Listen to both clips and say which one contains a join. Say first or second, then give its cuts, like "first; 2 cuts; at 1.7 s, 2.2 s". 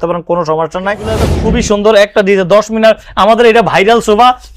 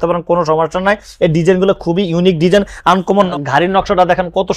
first; 1 cut; at 1.3 s